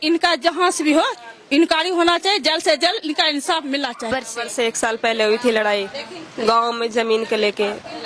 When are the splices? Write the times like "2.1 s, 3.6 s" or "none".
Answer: 4.1 s